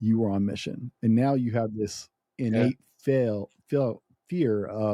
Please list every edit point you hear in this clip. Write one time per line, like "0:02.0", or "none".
none